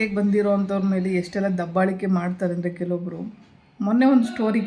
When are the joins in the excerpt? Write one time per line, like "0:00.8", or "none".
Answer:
none

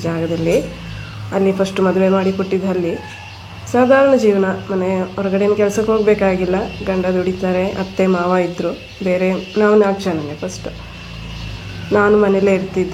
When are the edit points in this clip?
none

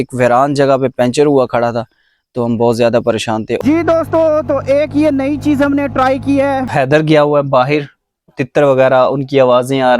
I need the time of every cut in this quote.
0:03.6
0:06.7
0:08.3

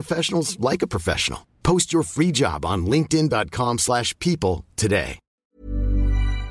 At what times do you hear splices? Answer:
0:05.4

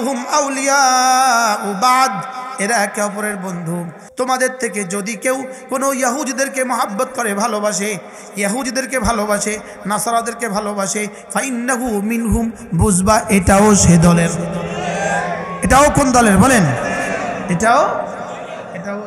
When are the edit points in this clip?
0:04.0

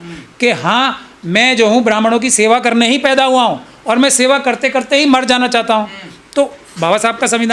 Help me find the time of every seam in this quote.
none

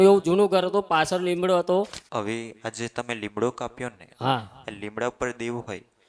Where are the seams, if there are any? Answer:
0:02.0

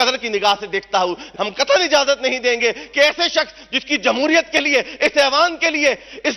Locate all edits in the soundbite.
0:01.3

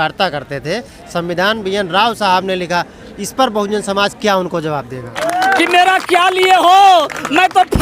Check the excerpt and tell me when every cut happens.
0:05.1

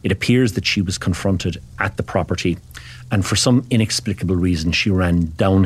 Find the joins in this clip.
none

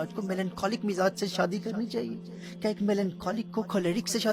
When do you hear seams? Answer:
none

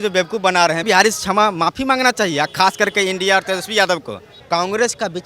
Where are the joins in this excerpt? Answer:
0:00.8
0:04.3

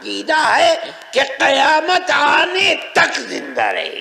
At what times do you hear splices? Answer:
none

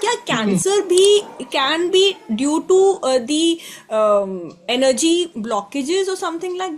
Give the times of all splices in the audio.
none

